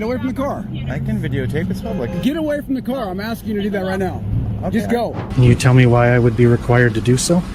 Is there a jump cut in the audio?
yes; 1 cut; at 5.2 s

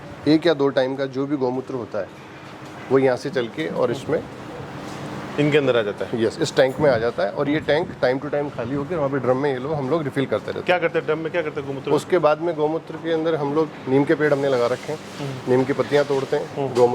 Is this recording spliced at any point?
no; 0 cuts

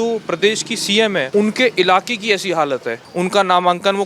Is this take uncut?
no; 2 cuts; at 1.3 s, 3.0 s

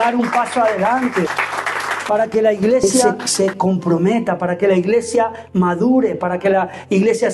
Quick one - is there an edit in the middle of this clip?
yes; 2 cuts; at 1.3 s, 3.0 s

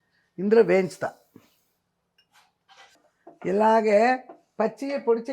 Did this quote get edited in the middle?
yes; 1 cut; at 3.1 s

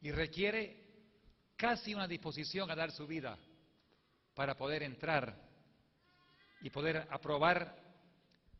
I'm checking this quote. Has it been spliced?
no; 0 cuts

